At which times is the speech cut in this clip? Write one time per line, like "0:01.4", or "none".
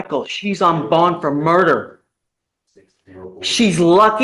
none